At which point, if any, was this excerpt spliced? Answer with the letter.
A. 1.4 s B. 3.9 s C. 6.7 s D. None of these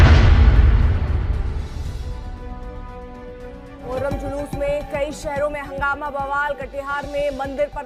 B